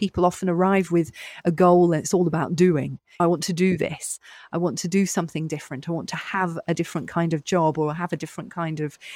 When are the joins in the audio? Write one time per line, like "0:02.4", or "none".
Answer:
none